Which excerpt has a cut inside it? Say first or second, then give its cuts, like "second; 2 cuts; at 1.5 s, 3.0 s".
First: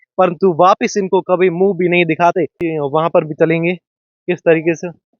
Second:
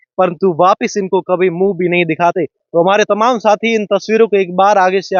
first; 1 cut; at 2.6 s